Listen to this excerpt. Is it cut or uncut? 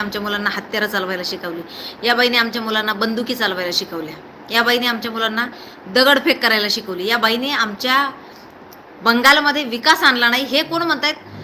uncut